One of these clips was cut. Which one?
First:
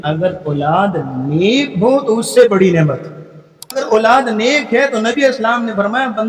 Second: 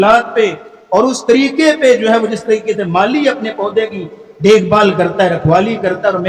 first; 1 cut; at 3.8 s

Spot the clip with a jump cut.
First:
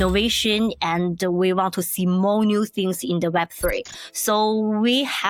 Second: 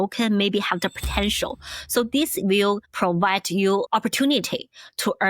second; 1 cut; at 3.9 s

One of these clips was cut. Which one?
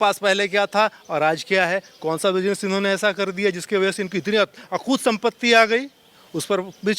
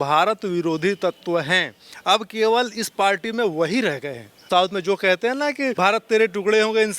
second; 2 cuts; at 4.5 s, 5.7 s

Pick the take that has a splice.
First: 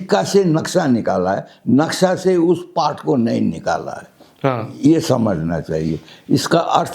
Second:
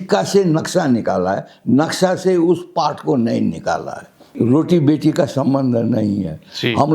second; 1 cut; at 4.2 s

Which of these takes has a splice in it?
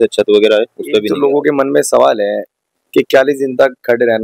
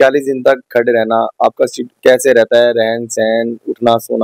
first; 1 cut; at 1.1 s

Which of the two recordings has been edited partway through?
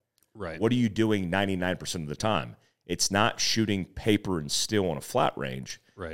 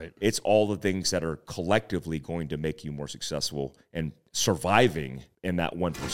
second; 2 cuts; at 4.3 s, 5.2 s

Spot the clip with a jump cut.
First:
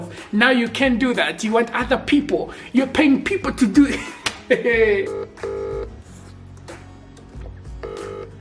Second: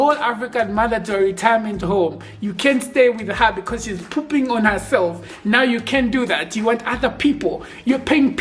first; 1 cut; at 5.1 s

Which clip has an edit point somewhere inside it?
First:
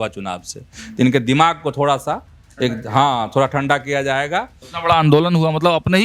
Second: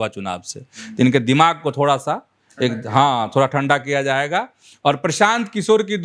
first; 1 cut; at 4.6 s

